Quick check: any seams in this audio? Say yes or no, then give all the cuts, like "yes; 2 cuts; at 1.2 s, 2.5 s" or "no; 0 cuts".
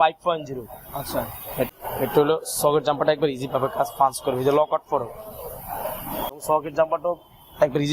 yes; 2 cuts; at 1.8 s, 6.4 s